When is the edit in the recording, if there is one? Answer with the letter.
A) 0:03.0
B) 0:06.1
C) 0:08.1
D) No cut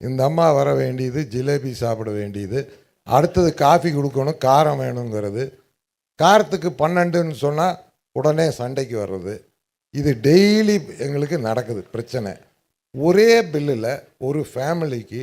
D